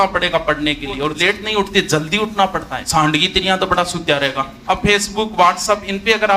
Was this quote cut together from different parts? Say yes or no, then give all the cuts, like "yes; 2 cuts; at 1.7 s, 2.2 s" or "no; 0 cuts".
yes; 3 cuts; at 1.1 s, 2.8 s, 4.5 s